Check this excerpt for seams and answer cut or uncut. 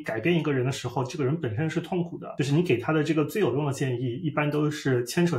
cut